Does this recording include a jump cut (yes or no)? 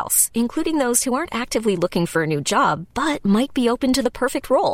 no